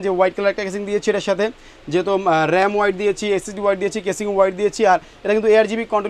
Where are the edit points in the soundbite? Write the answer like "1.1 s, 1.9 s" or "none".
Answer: none